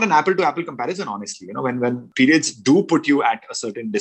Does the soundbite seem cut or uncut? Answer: cut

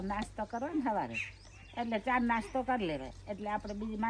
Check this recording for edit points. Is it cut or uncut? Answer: uncut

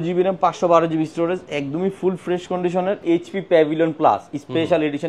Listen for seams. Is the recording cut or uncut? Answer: cut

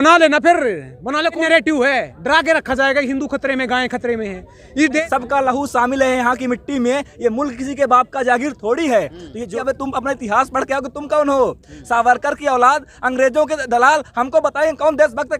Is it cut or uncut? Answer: cut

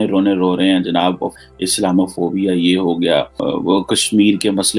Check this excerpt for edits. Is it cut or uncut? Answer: cut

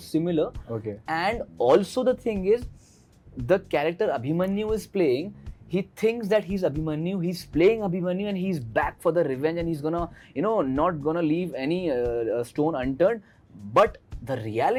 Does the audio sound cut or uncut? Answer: uncut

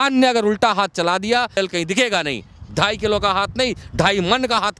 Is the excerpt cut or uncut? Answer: cut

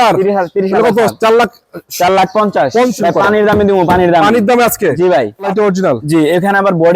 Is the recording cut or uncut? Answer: cut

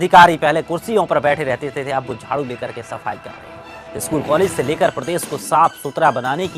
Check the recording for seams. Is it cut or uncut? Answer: cut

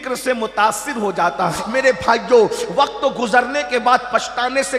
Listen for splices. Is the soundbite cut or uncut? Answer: cut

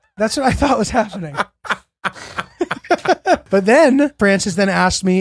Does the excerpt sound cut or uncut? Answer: cut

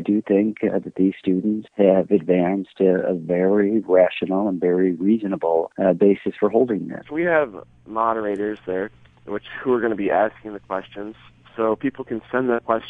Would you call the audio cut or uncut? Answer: cut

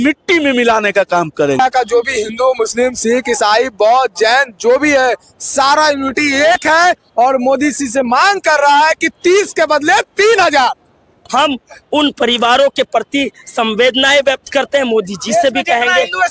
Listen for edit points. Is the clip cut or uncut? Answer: cut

